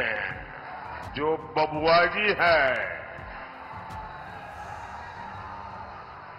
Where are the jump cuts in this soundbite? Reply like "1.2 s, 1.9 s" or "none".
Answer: 1.0 s